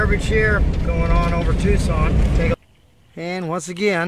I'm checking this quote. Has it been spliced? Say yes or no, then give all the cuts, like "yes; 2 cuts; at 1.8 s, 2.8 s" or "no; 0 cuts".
yes; 1 cut; at 2.5 s